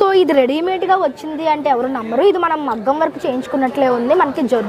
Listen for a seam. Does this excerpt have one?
no; 0 cuts

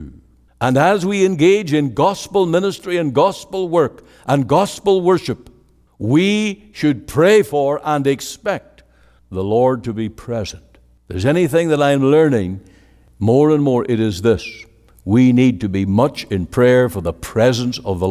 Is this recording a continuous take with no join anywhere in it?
yes; 0 cuts

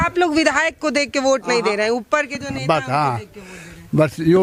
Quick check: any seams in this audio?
no; 0 cuts

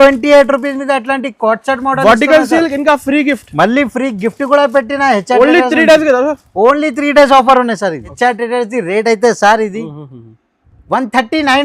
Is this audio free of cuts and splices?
no; 1 cut; at 8.1 s

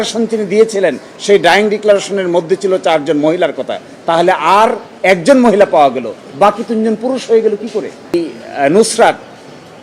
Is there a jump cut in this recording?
yes; 1 cut; at 8.1 s

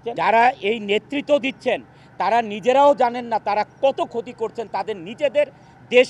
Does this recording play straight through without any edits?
yes; 0 cuts

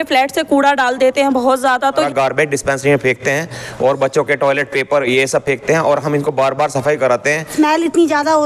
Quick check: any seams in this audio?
yes; 2 cuts; at 2.1 s, 7.5 s

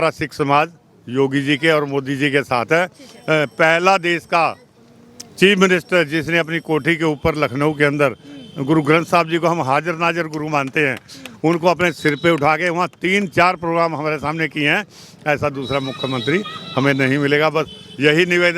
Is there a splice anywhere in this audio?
no; 0 cuts

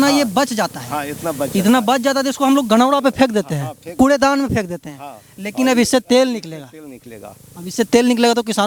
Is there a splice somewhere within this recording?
no; 0 cuts

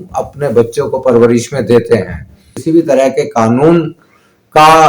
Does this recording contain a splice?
yes; 1 cut; at 2.5 s

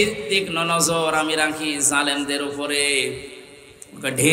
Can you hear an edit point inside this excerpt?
no; 0 cuts

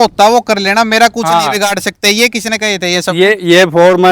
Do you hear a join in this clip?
no; 0 cuts

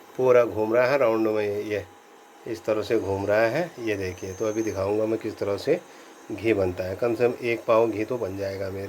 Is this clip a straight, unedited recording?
yes; 0 cuts

